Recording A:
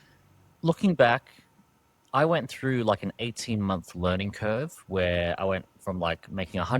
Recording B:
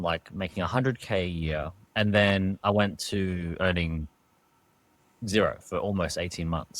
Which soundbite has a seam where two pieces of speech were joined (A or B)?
B